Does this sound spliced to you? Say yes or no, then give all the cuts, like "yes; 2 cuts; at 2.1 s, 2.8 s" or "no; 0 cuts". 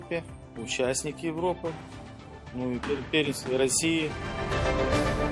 yes; 1 cut; at 4.2 s